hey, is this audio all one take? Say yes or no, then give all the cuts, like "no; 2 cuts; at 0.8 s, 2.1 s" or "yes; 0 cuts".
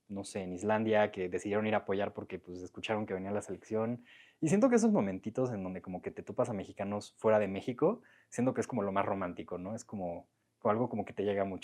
yes; 0 cuts